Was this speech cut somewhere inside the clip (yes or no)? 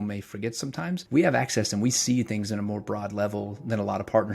yes